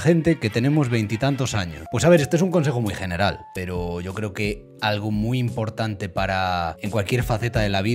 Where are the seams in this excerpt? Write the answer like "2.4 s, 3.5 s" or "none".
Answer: 1.7 s, 3.5 s